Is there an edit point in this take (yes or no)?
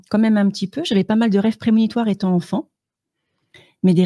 no